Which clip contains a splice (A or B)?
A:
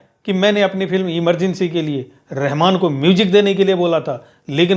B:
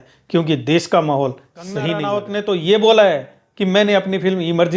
B